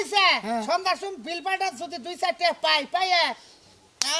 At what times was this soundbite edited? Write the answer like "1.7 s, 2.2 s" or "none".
none